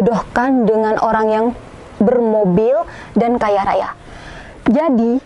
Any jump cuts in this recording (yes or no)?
no